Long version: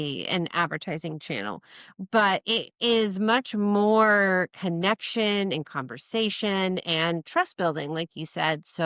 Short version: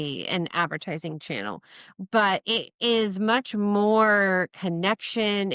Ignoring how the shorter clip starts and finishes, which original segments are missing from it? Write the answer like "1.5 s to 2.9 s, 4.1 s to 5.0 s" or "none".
none